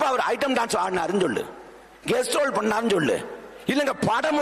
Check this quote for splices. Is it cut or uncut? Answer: uncut